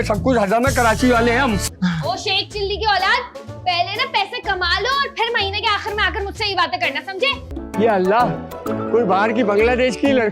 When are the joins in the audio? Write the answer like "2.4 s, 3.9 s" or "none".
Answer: 1.6 s, 7.5 s